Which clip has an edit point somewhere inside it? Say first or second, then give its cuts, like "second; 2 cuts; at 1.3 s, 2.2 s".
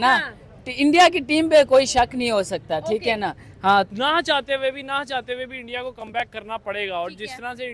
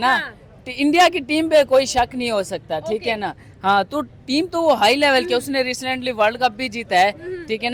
first; 1 cut; at 3.9 s